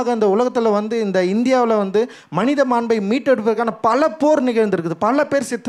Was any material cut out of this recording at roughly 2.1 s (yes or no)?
no